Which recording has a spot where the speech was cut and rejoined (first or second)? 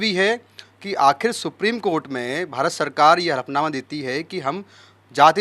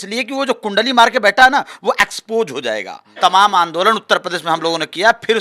second